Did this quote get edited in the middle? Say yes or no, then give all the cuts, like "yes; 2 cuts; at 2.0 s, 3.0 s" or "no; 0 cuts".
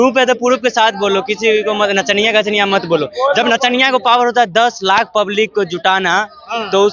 no; 0 cuts